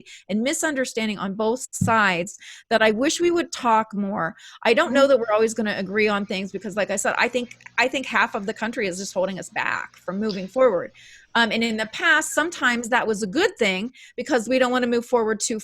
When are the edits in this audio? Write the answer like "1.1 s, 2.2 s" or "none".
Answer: none